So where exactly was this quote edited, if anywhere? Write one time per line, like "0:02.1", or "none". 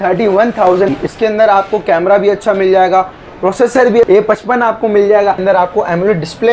0:00.9
0:04.0
0:05.4